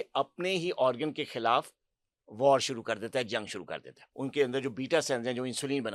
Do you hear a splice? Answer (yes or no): yes